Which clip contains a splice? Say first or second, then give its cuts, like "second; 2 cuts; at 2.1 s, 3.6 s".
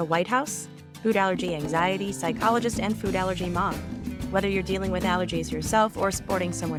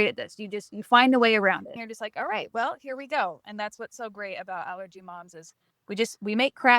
second; 1 cut; at 1.7 s